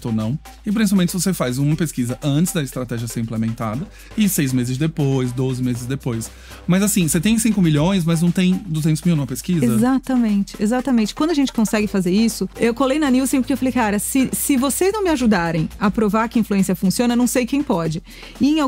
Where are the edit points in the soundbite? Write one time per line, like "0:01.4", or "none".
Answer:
0:12.5